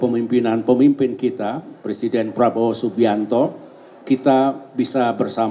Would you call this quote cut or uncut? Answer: uncut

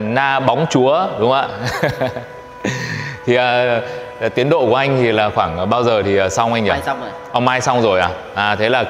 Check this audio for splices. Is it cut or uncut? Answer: uncut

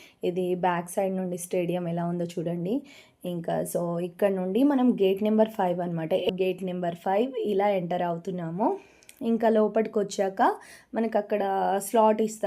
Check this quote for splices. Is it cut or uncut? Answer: cut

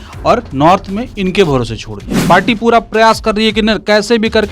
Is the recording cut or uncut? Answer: cut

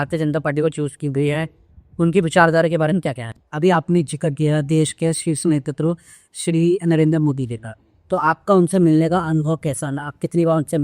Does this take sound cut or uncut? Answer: cut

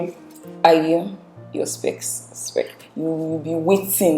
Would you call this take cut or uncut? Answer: cut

